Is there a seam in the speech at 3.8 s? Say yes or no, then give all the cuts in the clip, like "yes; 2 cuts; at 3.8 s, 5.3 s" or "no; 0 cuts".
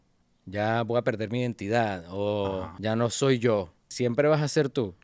yes; 2 cuts; at 2.7 s, 3.8 s